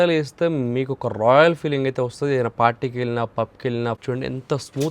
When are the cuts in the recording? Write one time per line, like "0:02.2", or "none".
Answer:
0:04.0

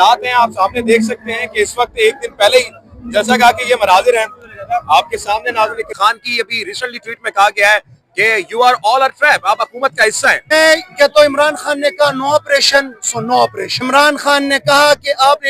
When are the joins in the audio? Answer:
0:05.9
0:10.5
0:13.7

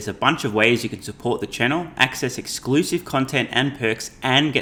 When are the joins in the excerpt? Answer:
none

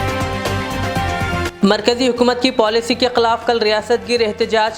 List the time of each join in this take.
0:01.5

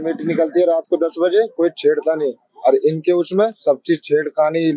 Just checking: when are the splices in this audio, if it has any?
none

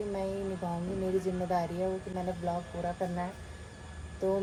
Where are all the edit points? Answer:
none

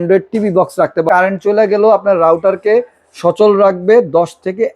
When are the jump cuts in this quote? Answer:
0:01.0

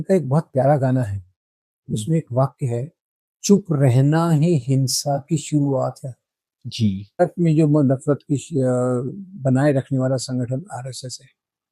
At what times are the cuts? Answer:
0:07.2

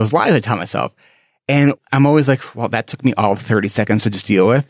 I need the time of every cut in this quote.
0:01.8

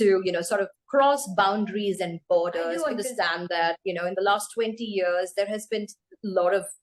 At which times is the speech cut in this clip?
0:02.9

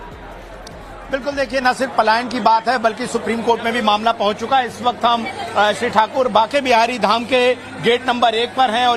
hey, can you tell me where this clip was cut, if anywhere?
none

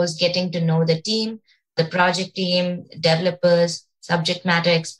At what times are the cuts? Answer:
0:01.8

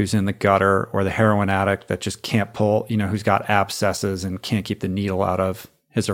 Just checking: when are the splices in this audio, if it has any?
none

